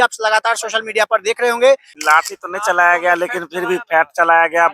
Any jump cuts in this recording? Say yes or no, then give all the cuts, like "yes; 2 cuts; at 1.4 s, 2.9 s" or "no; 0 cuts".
yes; 1 cut; at 1.9 s